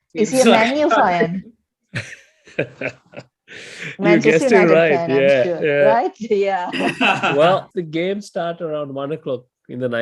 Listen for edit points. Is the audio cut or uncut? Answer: cut